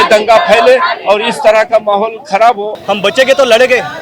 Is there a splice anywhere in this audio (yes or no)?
yes